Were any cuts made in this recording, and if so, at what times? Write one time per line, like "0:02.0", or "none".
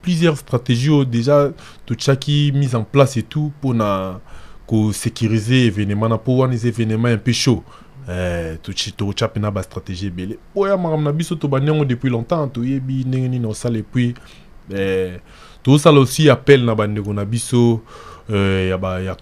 none